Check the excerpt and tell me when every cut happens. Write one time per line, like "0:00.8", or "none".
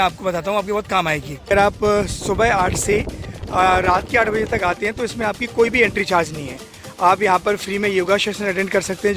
0:01.5